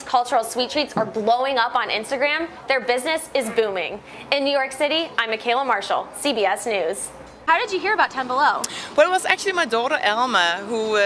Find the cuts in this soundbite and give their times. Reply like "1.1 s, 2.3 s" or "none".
7.5 s